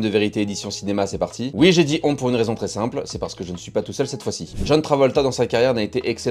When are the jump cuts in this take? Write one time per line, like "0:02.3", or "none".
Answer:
none